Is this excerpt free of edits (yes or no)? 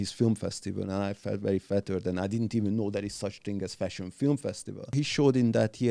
no